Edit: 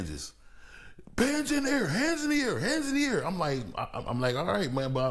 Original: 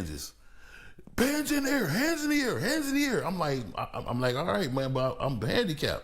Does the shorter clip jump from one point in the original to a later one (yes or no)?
no